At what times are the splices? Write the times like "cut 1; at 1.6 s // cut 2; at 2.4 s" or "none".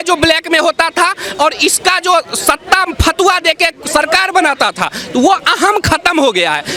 none